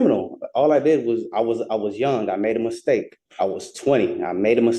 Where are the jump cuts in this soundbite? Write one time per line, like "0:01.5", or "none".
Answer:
0:03.2